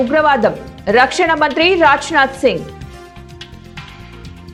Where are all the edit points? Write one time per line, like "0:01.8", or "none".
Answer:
none